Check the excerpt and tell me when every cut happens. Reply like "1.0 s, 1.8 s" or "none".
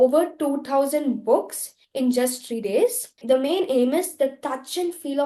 3.1 s